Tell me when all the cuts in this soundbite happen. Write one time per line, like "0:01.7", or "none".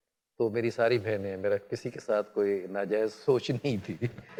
none